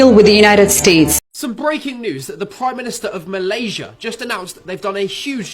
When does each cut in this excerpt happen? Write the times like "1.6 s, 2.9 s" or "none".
1.1 s